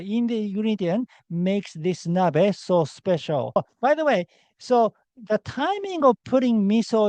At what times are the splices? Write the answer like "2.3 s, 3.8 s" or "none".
3.6 s